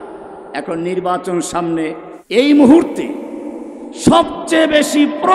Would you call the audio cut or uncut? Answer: cut